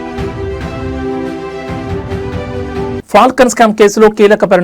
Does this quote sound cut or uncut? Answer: cut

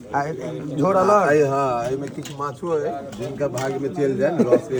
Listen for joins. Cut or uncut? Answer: uncut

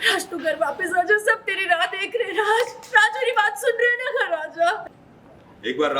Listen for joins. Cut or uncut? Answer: cut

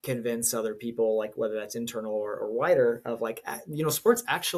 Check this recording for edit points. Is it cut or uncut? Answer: uncut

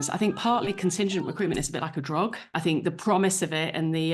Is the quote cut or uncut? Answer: cut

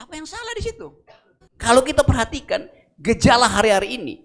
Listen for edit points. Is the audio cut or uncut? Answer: cut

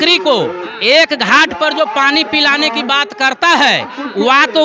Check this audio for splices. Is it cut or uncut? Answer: uncut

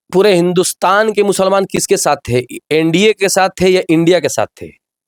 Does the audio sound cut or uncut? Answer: uncut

